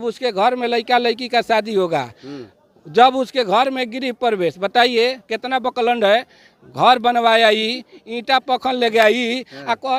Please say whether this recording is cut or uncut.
uncut